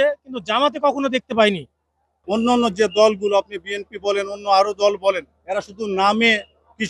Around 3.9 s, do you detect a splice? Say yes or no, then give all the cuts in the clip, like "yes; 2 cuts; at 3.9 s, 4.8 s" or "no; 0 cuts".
no; 1 cut; at 2.2 s